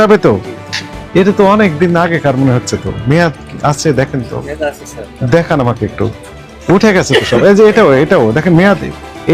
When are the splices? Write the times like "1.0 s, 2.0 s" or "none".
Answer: none